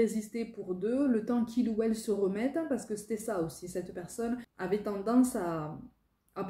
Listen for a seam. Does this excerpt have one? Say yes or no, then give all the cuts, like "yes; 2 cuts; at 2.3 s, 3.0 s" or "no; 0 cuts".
yes; 1 cut; at 4.5 s